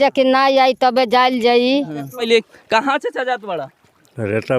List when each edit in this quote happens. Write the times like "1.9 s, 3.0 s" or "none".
2.3 s